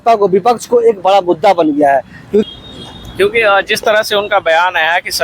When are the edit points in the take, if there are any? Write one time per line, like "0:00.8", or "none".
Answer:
0:02.5

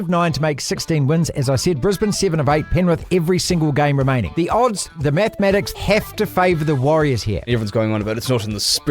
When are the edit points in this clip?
0:04.3
0:05.7
0:07.4

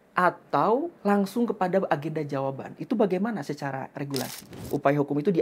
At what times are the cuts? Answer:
0:00.9
0:04.6

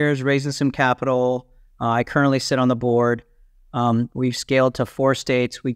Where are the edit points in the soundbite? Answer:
none

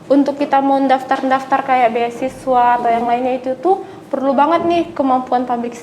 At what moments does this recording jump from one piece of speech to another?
none

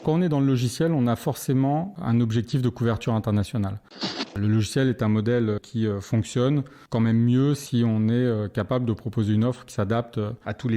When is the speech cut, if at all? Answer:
0:04.3
0:05.6
0:06.8

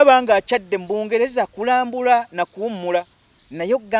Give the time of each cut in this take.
none

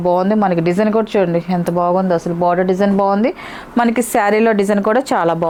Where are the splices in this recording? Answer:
none

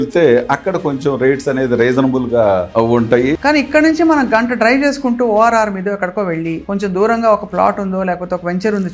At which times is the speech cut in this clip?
0:03.3
0:06.6

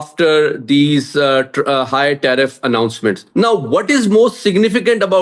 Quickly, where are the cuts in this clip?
none

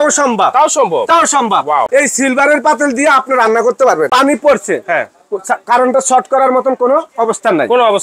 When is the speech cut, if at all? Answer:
0:01.9
0:04.1

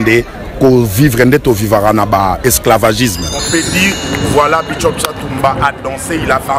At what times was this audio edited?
0:03.4

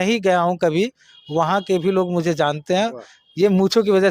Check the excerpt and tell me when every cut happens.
none

